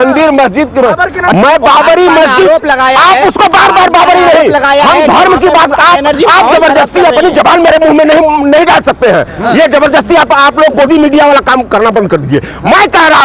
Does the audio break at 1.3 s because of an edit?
yes; 1 cut; at 1.3 s

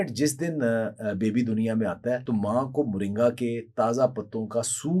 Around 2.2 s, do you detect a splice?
yes; 1 cut; at 2.2 s

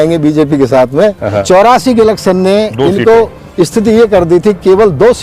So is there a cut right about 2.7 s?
no; 1 cut; at 1.4 s

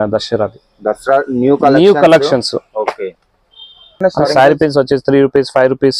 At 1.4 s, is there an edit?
no; 1 cut; at 4.0 s

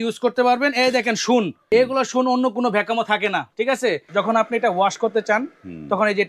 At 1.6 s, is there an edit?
yes; 2 cuts; at 1.6 s, 4.0 s

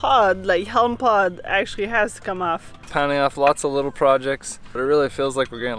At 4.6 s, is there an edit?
yes; 2 cuts; at 2.8 s, 4.6 s

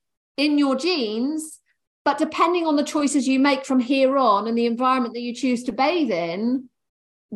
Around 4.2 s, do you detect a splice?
no; 0 cuts

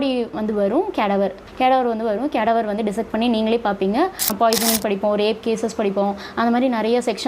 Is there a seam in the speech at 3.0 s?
no; 2 cuts; at 1.4 s, 4.3 s

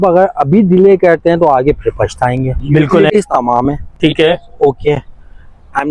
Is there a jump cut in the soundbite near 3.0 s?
yes; 1 cut; at 3.0 s

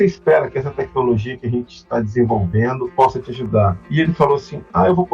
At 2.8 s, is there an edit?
yes; 2 cuts; at 2.8 s, 3.8 s

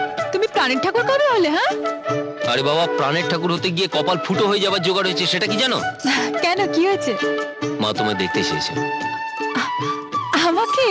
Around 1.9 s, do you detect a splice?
no; 0 cuts

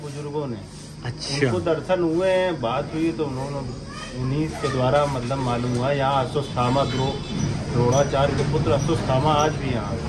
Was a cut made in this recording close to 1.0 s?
no; 0 cuts

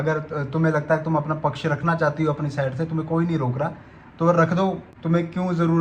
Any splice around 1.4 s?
no; 1 cut; at 4.9 s

